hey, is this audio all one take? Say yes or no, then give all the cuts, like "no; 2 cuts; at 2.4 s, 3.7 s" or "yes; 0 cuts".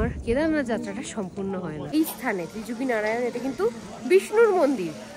no; 1 cut; at 1.9 s